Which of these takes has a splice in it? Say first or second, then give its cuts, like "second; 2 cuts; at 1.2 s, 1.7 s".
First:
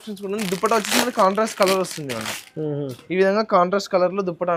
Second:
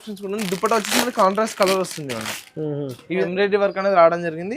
second; 1 cut; at 3.2 s